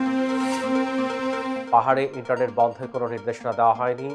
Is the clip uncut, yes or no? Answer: yes